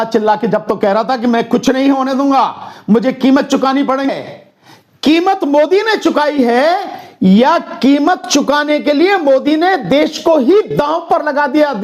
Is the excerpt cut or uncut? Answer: cut